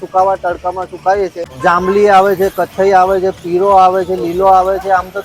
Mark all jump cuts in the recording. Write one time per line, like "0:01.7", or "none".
0:01.5